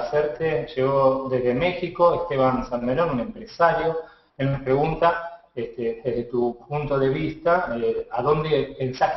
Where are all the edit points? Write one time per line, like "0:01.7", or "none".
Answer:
0:07.4